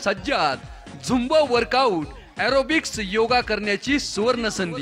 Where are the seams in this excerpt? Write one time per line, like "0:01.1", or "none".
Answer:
none